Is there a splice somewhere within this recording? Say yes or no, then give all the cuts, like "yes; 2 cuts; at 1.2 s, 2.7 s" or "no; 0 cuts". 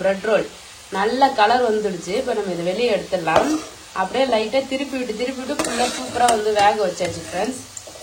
no; 0 cuts